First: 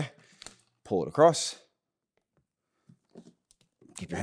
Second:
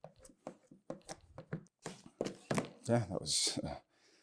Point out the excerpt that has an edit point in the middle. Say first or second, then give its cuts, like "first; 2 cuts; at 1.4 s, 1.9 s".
second; 1 cut; at 1.7 s